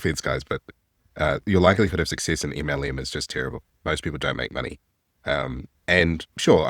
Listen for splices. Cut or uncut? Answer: uncut